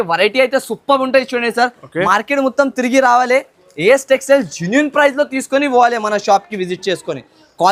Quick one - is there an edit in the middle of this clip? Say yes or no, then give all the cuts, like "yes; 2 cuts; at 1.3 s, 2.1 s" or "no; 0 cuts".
no; 0 cuts